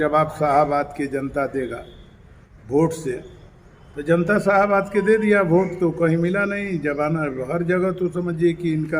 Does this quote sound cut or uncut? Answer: uncut